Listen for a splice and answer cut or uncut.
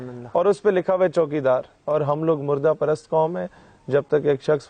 cut